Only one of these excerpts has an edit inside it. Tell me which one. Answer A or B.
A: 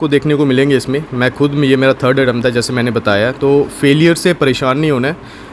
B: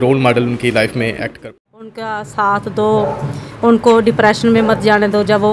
B